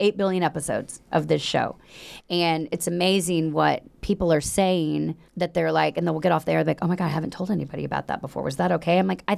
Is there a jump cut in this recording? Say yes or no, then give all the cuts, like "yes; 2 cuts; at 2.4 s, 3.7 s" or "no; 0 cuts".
yes; 1 cut; at 5.2 s